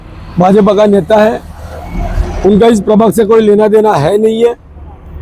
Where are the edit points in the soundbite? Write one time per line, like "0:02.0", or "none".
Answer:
none